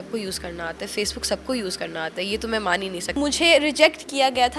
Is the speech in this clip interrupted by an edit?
yes; 1 cut; at 3.2 s

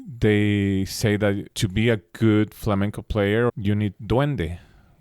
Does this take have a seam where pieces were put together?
yes; 2 cuts; at 1.5 s, 3.5 s

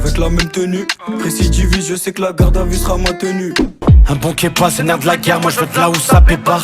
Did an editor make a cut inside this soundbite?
yes; 1 cut; at 3.5 s

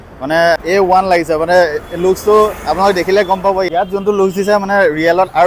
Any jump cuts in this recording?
yes; 1 cut; at 3.7 s

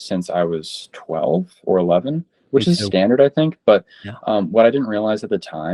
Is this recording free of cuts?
yes; 0 cuts

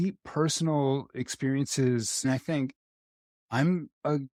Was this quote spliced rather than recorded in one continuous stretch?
no; 0 cuts

